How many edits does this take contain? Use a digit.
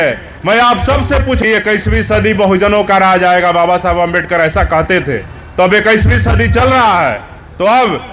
1